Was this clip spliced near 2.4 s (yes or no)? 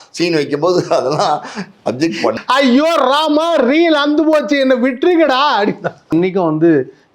yes